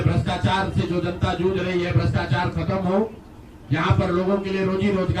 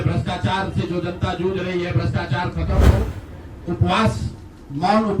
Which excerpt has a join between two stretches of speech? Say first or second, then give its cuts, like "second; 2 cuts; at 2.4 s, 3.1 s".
second; 1 cut; at 2.9 s